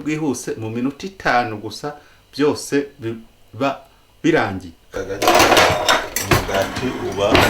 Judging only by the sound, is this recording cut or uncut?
cut